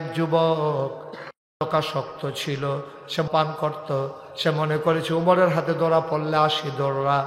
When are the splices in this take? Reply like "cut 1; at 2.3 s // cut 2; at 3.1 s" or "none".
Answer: cut 1; at 3.3 s